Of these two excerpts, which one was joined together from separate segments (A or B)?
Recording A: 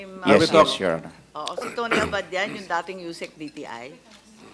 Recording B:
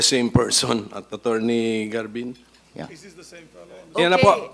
B